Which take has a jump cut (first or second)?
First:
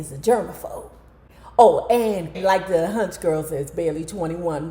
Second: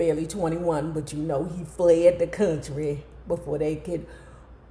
first